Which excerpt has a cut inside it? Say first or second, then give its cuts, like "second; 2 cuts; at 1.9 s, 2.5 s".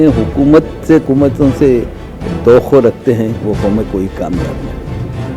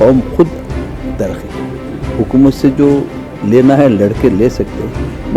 first; 1 cut; at 1.0 s